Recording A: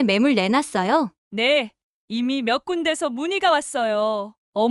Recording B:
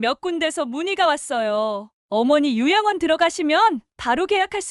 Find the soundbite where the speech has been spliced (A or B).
A